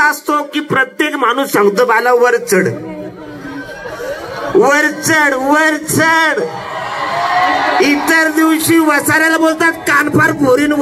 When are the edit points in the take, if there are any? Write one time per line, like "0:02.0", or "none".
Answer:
none